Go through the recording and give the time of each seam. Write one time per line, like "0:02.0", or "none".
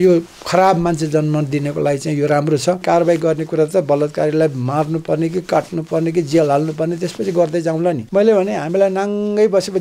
0:02.8
0:08.0